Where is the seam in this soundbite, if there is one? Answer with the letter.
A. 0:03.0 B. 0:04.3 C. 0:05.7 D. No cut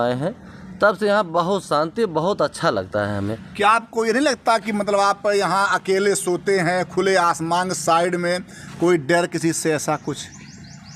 D